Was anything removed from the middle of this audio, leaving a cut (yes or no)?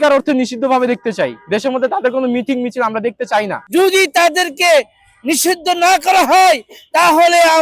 yes